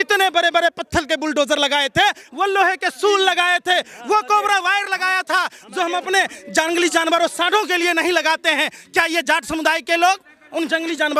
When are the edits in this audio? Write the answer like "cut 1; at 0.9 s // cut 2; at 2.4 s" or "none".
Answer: none